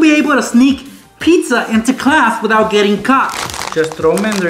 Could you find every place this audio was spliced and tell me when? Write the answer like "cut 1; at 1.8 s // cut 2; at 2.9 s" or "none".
cut 1; at 3.4 s